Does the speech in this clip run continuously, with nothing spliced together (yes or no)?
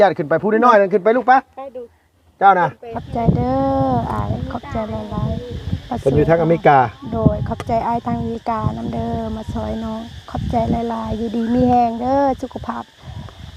no